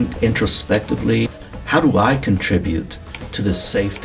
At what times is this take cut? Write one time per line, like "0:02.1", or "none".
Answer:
0:01.3